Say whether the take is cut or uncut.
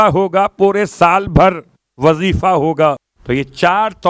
cut